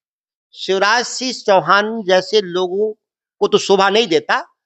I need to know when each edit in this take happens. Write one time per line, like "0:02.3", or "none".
none